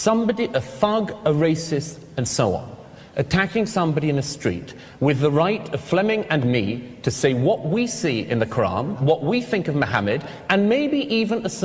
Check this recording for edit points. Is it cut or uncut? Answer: uncut